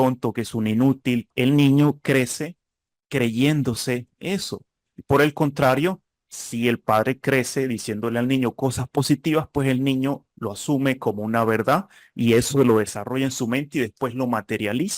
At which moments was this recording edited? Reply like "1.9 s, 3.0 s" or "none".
1.3 s